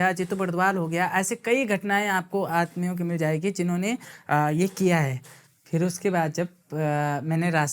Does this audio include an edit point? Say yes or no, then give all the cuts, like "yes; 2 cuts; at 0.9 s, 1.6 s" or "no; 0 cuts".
no; 0 cuts